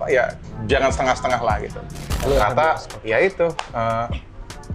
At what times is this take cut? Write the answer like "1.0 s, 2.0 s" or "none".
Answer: 2.1 s

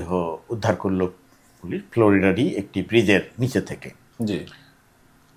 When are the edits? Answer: none

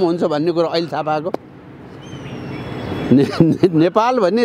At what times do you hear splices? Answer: none

